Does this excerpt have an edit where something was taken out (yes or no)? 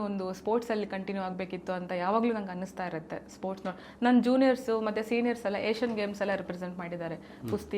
no